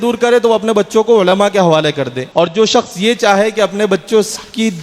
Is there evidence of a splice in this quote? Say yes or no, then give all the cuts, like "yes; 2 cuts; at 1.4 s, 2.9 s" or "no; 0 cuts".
yes; 1 cut; at 2.2 s